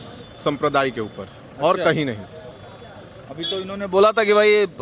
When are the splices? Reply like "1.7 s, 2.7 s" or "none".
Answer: none